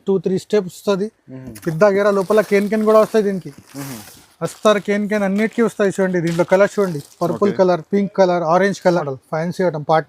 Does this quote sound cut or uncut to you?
cut